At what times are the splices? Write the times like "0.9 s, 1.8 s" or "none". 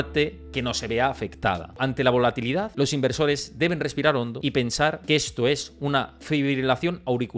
1.8 s, 2.7 s, 4.8 s

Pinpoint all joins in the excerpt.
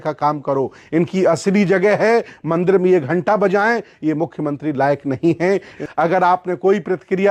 5.8 s

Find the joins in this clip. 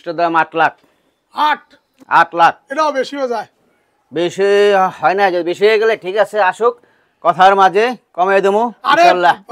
none

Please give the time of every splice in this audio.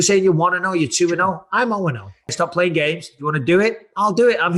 2.3 s

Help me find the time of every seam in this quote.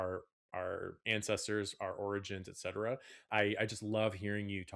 3.2 s

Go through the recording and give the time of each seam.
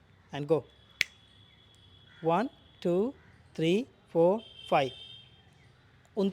none

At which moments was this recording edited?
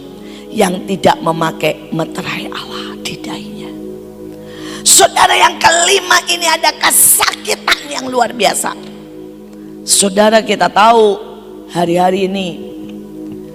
none

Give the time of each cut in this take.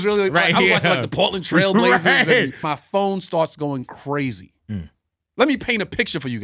2.7 s

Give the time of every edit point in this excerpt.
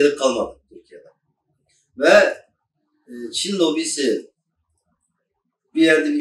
none

